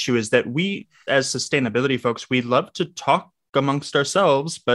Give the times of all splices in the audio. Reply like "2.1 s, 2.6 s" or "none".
1.0 s